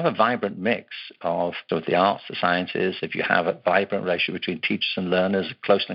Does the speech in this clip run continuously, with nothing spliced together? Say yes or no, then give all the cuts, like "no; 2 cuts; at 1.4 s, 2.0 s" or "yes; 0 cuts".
no; 1 cut; at 1.6 s